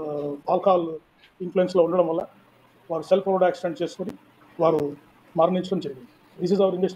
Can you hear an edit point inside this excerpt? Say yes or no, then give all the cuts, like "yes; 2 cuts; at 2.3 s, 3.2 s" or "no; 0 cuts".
no; 0 cuts